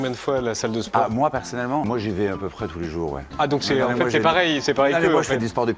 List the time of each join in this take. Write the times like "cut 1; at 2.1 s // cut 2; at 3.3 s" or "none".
cut 1; at 1.8 s // cut 2; at 3.3 s